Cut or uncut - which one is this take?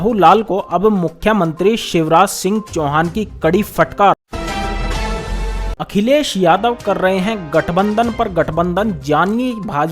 cut